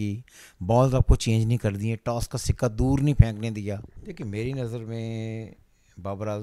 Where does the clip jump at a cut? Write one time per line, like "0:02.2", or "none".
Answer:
0:04.0